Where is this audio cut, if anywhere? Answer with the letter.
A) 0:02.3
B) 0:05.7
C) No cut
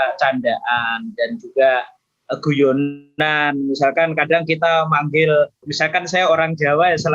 B